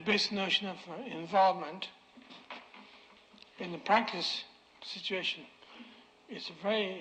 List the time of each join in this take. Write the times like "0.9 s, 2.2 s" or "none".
5.4 s